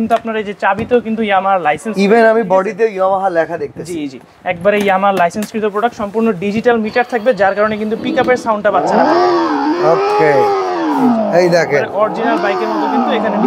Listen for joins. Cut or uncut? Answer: uncut